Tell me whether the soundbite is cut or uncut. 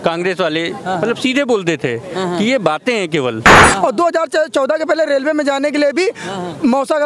cut